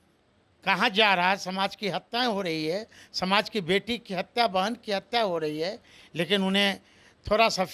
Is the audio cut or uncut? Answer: uncut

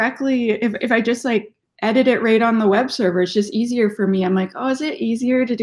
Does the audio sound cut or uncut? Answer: uncut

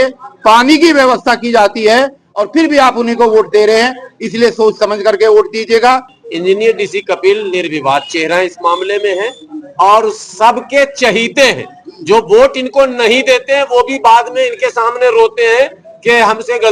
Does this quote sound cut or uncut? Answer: cut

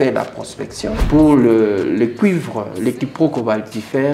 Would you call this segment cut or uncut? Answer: cut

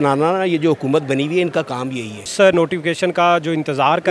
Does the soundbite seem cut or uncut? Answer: cut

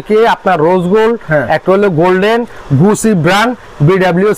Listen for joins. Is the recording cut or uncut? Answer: cut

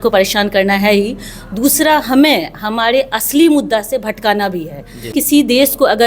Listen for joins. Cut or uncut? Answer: cut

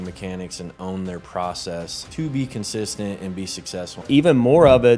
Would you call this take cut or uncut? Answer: cut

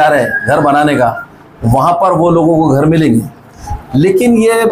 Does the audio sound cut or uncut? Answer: uncut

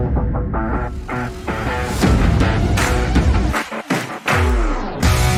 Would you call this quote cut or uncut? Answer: uncut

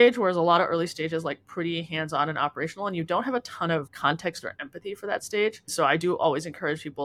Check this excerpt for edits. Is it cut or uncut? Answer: cut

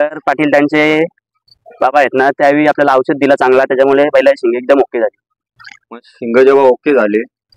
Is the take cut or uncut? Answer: uncut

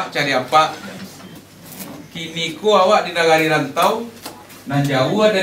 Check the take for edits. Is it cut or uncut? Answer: cut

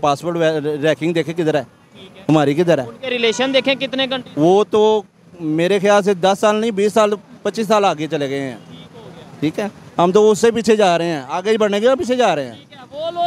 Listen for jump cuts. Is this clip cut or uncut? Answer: uncut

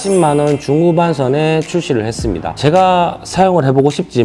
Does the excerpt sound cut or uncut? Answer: cut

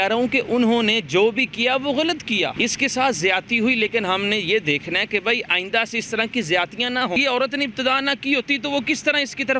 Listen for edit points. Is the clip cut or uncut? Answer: cut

